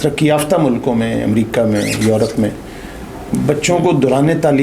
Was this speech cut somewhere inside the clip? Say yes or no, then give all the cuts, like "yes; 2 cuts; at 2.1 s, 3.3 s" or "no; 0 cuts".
no; 0 cuts